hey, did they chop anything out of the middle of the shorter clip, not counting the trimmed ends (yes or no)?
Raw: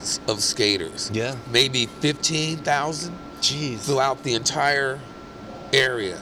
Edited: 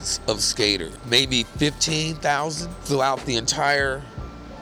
yes